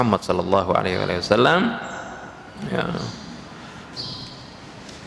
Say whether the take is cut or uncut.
uncut